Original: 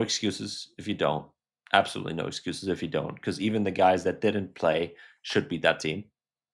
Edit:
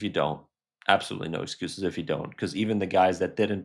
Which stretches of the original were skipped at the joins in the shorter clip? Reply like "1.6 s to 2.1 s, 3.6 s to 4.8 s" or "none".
none